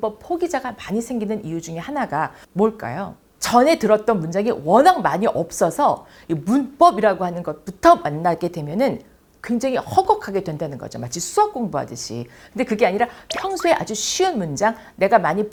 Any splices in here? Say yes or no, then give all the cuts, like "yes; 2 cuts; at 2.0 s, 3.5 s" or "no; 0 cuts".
no; 0 cuts